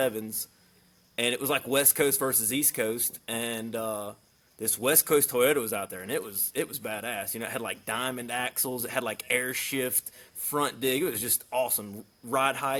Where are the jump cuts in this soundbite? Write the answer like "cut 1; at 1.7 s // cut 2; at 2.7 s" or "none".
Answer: none